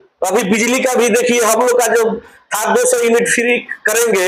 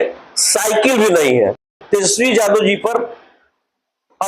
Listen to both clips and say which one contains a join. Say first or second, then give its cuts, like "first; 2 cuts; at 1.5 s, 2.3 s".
second; 1 cut; at 1.7 s